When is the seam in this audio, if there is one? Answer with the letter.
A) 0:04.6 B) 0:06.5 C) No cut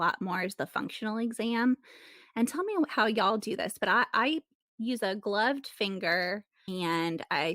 B